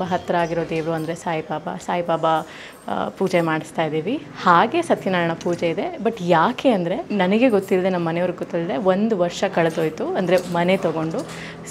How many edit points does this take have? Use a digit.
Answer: 0